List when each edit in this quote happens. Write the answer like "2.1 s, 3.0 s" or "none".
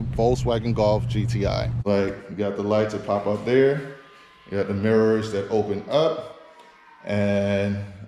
1.7 s